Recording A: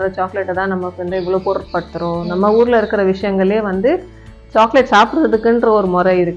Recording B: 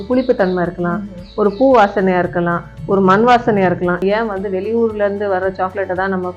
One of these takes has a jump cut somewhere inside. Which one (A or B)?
B